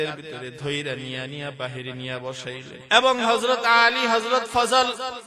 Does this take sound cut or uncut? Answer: cut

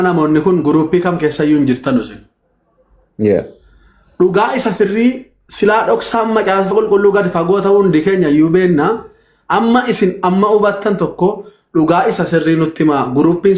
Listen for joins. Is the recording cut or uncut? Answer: uncut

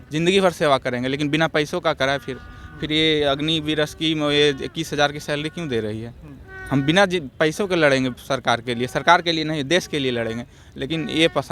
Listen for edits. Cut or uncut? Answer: uncut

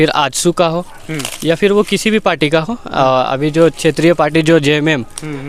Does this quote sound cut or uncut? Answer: uncut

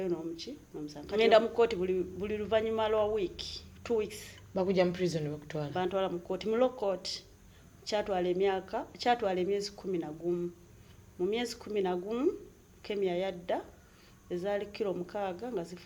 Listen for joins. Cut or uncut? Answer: cut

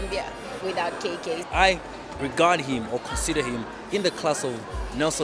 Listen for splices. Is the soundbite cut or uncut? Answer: cut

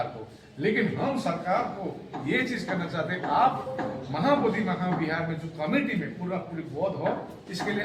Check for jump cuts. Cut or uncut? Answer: uncut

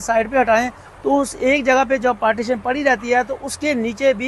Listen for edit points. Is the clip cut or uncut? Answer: uncut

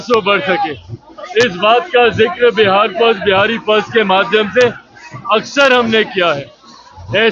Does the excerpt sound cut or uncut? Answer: uncut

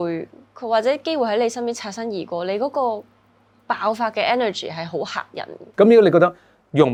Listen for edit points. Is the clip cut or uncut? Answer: uncut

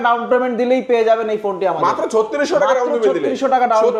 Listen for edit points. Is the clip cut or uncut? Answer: uncut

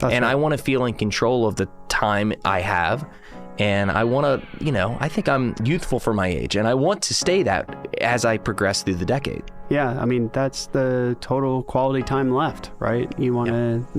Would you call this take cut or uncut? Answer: cut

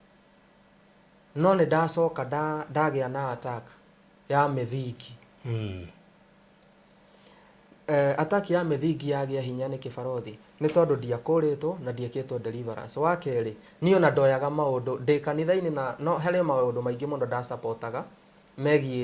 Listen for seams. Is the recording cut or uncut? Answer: uncut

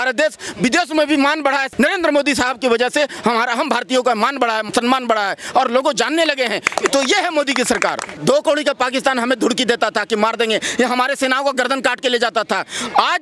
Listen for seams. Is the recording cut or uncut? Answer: cut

